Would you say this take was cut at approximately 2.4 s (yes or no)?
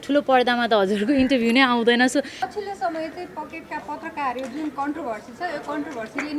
yes